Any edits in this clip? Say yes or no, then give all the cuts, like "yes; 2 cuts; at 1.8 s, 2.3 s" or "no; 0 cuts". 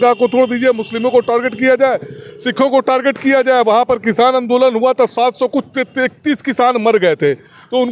no; 0 cuts